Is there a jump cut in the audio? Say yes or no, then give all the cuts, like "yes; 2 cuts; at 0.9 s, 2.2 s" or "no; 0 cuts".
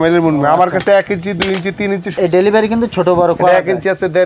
yes; 1 cut; at 2.2 s